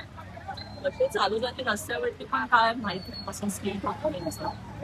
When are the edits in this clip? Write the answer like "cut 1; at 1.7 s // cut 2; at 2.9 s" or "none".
none